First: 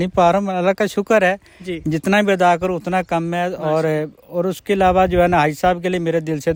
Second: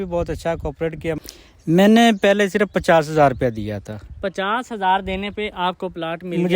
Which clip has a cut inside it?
second; 1 cut; at 1.2 s

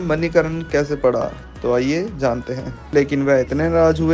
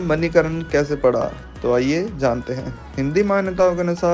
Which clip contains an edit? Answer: first; 1 cut; at 2.9 s

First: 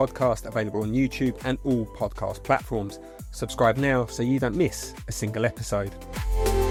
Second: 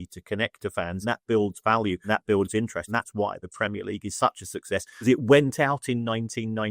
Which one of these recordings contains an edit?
second; 4 cuts; at 1.0 s, 2.0 s, 2.9 s, 5.0 s

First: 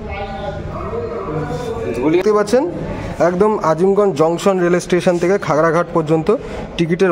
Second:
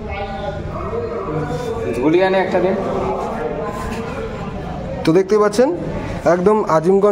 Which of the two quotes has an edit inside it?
first; 1 cut; at 2.2 s

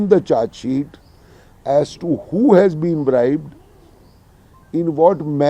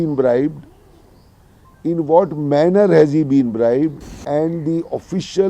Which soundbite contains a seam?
second; 1 cut; at 4.1 s

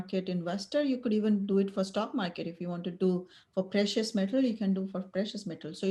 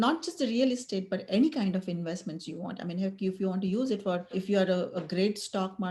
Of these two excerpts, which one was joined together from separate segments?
second; 1 cut; at 4.4 s

